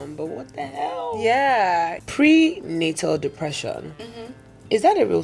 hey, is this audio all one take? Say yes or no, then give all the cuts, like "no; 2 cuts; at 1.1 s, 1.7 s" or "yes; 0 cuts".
no; 1 cut; at 2.0 s